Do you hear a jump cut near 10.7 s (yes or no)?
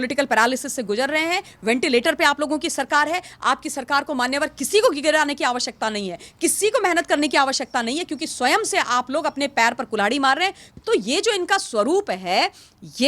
yes